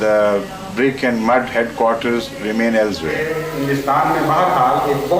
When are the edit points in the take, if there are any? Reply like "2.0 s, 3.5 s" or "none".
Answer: 3.2 s